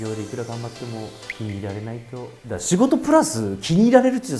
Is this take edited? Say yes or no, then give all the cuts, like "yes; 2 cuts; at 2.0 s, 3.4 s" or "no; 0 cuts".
no; 0 cuts